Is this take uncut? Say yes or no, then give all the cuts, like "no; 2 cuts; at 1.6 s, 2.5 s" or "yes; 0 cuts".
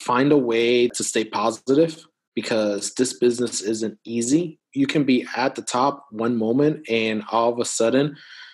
no; 2 cuts; at 0.9 s, 4.6 s